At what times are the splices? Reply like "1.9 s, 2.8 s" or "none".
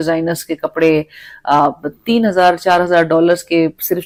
none